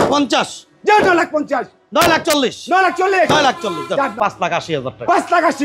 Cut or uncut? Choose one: cut